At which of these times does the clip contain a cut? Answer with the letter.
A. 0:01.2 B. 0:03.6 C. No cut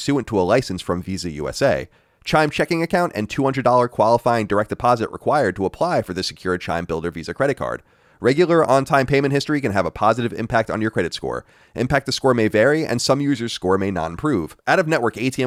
C